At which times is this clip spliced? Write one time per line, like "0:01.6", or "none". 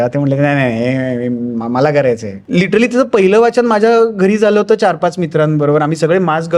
0:02.4